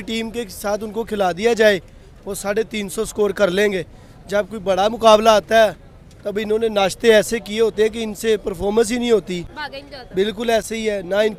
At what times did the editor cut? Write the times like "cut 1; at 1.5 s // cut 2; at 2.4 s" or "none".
none